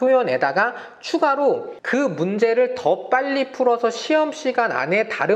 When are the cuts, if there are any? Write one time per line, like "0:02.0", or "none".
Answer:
0:01.7